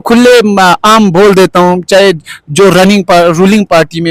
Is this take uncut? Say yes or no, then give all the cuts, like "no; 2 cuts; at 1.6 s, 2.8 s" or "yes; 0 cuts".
yes; 0 cuts